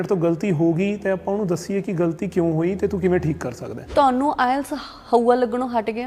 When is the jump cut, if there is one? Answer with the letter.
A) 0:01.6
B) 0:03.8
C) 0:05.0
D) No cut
B